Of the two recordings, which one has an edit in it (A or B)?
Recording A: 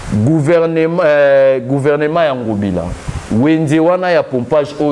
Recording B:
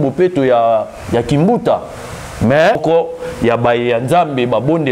B